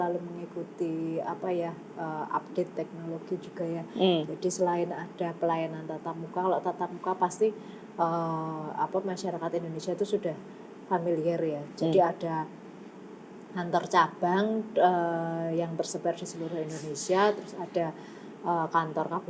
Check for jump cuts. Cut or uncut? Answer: uncut